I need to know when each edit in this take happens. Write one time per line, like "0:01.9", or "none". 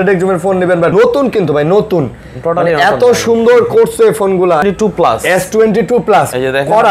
0:00.9
0:04.6